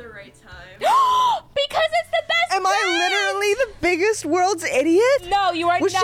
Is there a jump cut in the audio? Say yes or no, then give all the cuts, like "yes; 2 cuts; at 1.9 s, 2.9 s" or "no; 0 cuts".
no; 0 cuts